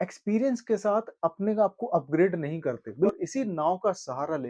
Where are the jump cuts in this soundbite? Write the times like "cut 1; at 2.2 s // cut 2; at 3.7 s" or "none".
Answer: cut 1; at 3.1 s